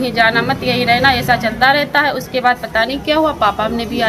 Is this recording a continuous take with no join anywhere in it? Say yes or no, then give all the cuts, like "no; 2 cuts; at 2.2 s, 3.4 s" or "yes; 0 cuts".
yes; 0 cuts